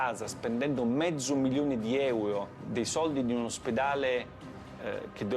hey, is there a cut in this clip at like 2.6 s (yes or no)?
yes